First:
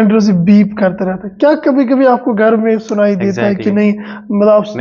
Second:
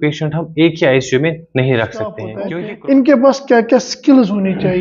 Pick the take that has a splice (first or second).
second